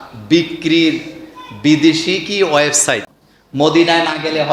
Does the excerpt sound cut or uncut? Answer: cut